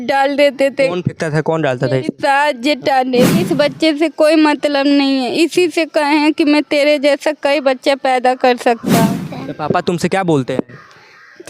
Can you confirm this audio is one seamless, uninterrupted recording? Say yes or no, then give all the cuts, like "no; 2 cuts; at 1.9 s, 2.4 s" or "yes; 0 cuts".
no; 2 cuts; at 3.4 s, 9.1 s